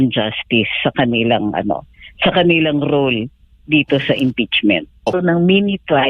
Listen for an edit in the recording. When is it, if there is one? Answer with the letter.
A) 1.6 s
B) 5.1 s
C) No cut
B